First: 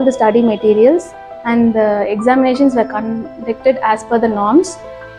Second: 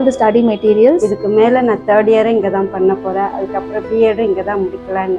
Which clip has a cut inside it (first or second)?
second